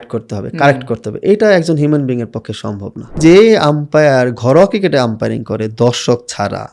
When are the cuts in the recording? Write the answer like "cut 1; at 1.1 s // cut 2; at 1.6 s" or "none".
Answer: cut 1; at 3.2 s

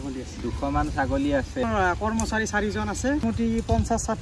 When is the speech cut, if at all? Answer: cut 1; at 1.7 s // cut 2; at 3.2 s

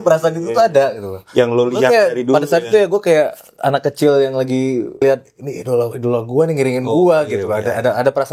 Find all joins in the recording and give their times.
cut 1; at 5.0 s

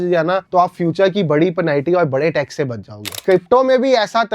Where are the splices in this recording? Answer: cut 1; at 3.2 s

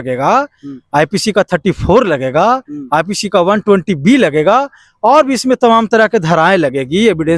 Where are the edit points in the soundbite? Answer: none

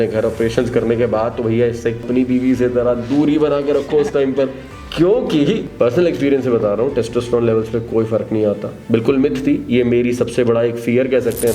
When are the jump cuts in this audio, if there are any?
cut 1; at 2.0 s // cut 2; at 5.6 s

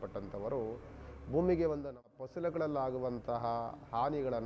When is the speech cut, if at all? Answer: cut 1; at 2.1 s

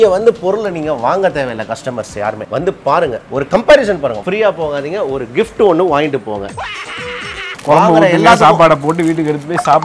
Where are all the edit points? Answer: cut 1; at 2.4 s // cut 2; at 6.5 s

